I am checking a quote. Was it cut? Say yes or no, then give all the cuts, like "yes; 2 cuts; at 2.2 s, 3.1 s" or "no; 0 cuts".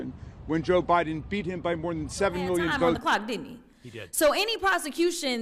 yes; 1 cut; at 3.0 s